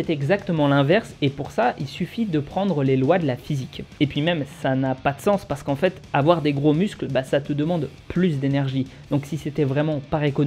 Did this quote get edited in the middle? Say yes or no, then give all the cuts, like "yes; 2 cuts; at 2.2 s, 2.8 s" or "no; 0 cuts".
yes; 1 cut; at 3.8 s